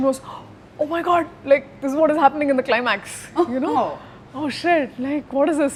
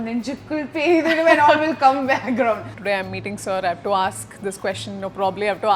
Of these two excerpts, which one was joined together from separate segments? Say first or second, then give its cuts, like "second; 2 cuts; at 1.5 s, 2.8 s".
second; 1 cut; at 2.7 s